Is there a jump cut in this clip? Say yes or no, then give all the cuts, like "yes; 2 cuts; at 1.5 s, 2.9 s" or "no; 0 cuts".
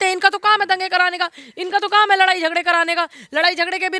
no; 0 cuts